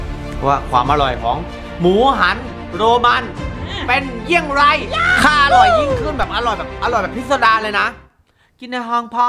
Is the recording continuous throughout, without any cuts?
yes; 0 cuts

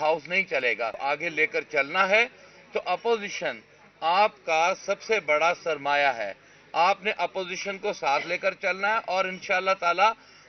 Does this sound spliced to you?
yes; 1 cut; at 1.0 s

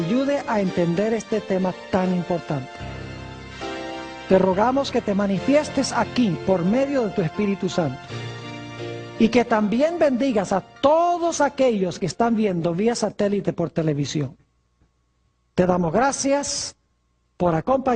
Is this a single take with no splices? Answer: yes; 0 cuts

